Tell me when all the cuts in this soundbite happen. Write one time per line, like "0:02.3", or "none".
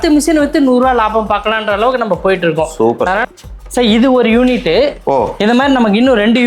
0:03.2